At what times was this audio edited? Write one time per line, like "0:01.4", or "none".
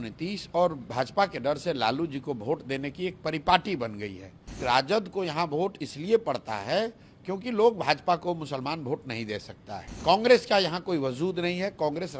0:04.6
0:09.9